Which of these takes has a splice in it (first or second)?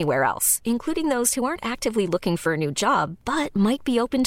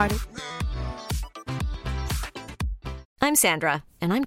second